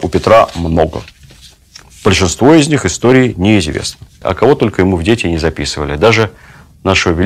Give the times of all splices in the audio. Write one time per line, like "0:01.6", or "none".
0:04.1